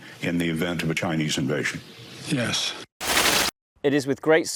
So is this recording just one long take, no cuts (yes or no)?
no